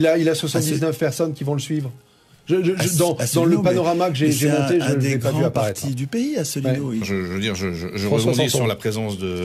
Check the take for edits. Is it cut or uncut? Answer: cut